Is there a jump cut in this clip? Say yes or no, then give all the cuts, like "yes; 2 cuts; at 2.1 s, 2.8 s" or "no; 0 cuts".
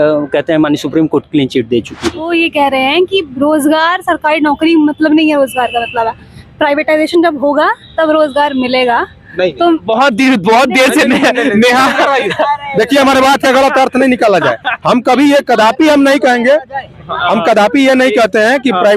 yes; 1 cut; at 2.3 s